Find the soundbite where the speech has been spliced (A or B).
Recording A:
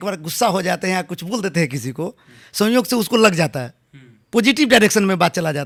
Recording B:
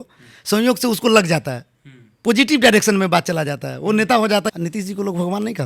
B